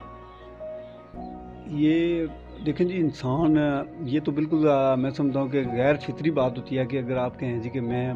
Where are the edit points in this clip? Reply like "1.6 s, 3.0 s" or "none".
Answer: none